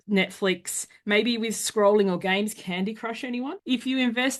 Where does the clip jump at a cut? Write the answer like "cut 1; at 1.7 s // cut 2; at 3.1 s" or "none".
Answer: none